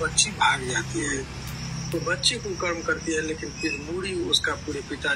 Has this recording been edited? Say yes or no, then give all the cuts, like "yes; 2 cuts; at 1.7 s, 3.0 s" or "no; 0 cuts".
no; 0 cuts